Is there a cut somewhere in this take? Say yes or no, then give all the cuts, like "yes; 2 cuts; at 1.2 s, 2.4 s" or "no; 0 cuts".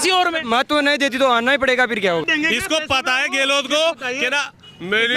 yes; 1 cut; at 2.2 s